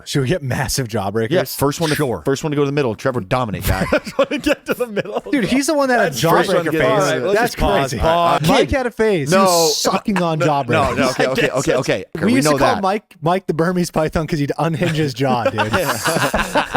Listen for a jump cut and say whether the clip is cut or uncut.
cut